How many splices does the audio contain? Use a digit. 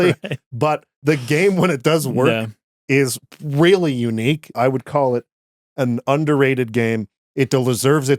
2